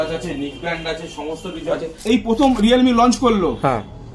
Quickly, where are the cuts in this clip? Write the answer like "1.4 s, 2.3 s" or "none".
1.9 s

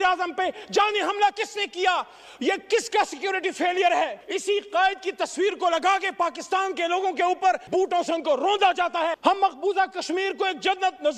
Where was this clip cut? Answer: 4.2 s, 9.2 s

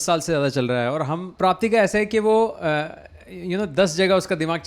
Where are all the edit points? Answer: 1.3 s

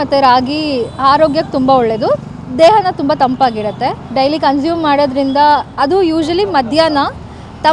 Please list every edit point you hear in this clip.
4.0 s

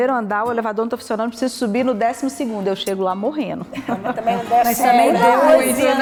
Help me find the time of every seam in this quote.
none

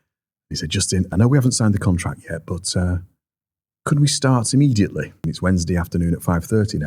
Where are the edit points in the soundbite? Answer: 1.1 s, 5.2 s

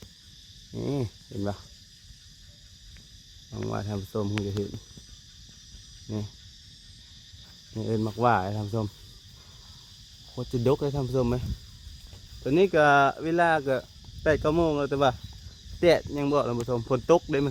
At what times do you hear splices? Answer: none

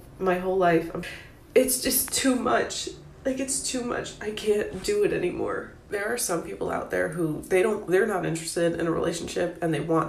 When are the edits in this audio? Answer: 1.0 s

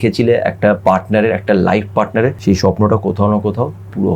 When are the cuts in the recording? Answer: 2.4 s

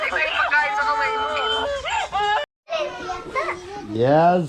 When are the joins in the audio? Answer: 2.5 s

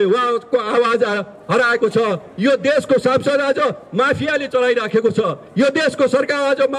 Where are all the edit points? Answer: none

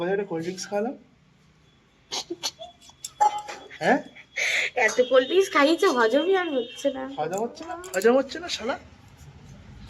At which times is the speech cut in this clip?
none

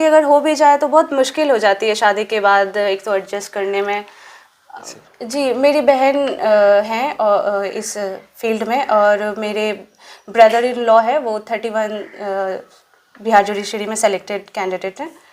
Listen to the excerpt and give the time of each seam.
4.8 s

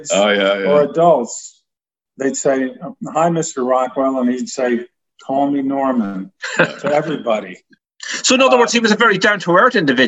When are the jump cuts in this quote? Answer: none

